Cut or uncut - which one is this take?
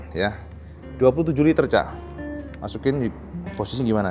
uncut